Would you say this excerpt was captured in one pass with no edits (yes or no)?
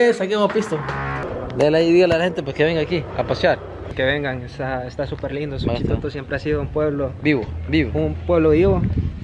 no